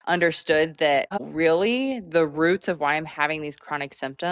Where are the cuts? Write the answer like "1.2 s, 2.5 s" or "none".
1.2 s